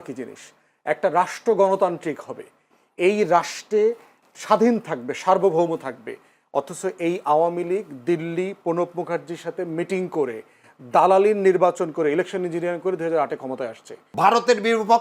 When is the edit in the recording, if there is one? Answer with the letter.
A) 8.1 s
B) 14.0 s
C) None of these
B